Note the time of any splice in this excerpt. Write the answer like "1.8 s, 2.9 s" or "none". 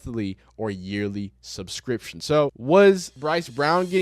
2.6 s, 3.1 s